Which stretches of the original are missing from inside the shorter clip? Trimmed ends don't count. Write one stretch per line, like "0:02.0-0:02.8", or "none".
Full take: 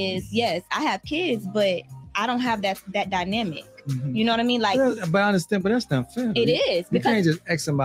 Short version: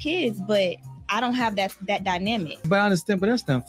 0:03.7-0:05.0

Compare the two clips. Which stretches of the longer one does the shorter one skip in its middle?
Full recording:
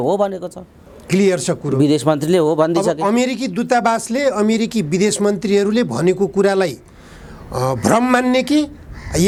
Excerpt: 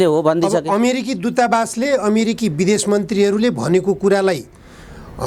none

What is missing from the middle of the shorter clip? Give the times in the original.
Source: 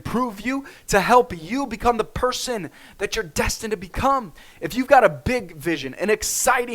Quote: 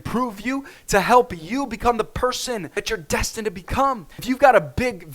0:02.7-0:02.9
0:04.4-0:04.6

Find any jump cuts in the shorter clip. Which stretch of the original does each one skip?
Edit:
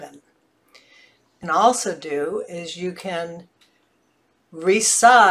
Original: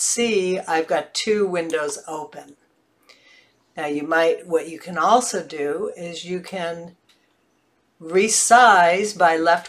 0:03.7-0:04.8

